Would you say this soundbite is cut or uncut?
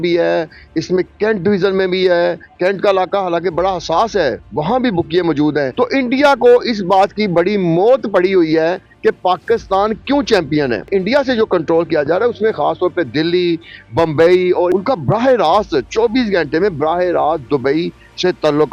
cut